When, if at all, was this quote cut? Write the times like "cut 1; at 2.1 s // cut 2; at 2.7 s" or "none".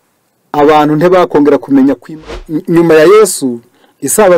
cut 1; at 2.3 s